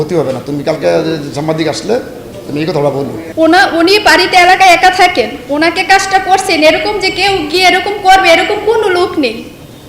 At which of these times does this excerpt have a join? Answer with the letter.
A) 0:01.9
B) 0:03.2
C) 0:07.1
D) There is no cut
B